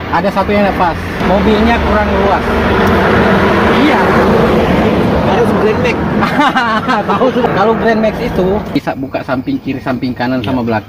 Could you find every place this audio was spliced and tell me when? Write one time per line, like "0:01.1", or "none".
0:01.2
0:07.5
0:08.8